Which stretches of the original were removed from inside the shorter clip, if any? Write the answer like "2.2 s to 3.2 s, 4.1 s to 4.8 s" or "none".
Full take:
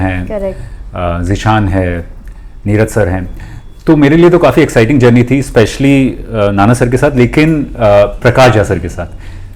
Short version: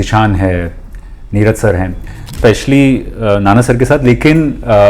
3.7 s to 5.5 s